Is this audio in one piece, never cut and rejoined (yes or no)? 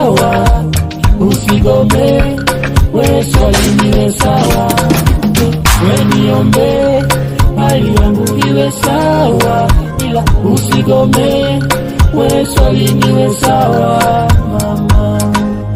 yes